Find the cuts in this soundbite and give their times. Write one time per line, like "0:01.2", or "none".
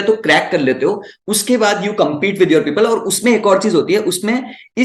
none